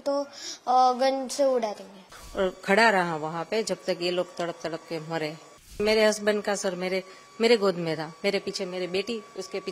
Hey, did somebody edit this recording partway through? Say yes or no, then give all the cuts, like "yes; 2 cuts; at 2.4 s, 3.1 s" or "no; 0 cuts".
yes; 2 cuts; at 2.2 s, 5.8 s